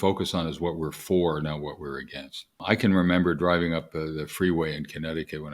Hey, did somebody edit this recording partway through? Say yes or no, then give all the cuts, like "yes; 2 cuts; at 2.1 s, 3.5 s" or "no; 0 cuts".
yes; 1 cut; at 2.6 s